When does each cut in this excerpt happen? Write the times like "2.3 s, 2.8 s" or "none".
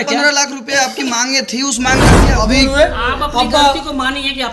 2.2 s

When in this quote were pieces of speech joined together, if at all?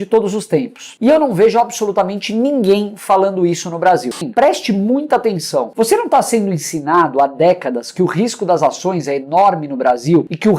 4.2 s

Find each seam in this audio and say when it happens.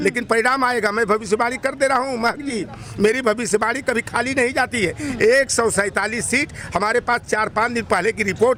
none

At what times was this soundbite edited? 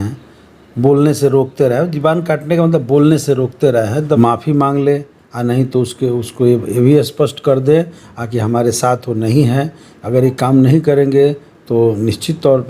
4.2 s

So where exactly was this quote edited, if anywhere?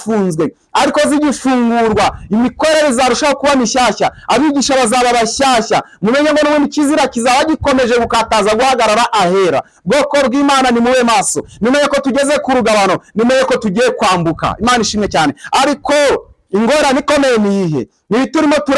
none

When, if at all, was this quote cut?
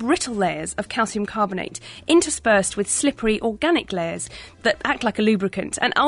4.5 s

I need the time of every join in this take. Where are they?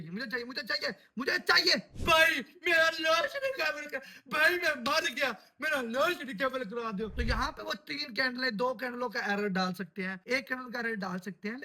1.9 s, 7.1 s

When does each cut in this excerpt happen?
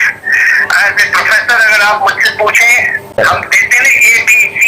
3.2 s

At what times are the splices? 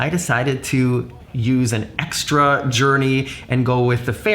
1.2 s

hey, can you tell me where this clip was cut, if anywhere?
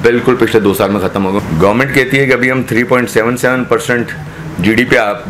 1.4 s

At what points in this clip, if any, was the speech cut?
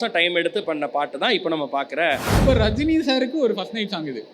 2.3 s

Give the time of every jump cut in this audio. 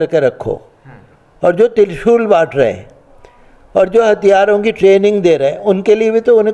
none

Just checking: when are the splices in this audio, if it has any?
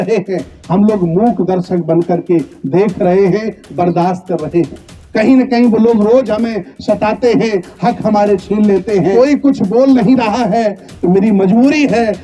9.1 s

